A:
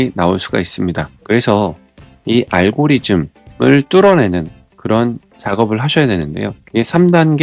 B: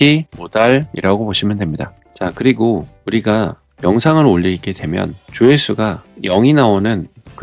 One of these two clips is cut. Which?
B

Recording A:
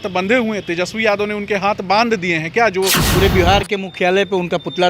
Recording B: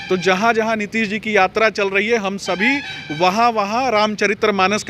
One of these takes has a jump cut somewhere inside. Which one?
A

